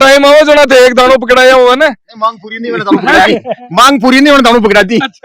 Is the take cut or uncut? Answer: uncut